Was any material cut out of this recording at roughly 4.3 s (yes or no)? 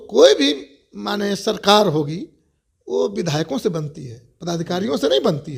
no